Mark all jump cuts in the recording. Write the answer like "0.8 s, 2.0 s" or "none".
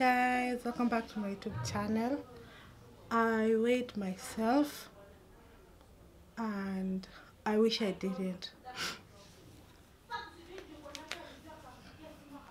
none